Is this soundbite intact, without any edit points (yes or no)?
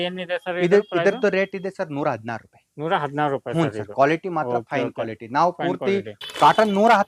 no